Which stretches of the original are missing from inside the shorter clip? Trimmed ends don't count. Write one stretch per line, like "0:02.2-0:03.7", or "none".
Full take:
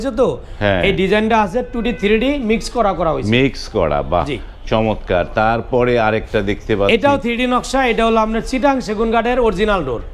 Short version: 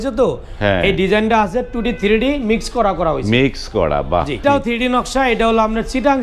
0:04.4-0:07.0